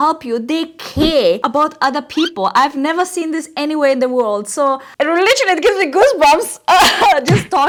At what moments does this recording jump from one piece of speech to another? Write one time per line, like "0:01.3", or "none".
none